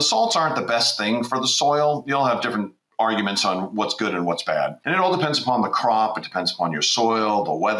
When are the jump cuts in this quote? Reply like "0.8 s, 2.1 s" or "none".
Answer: 4.8 s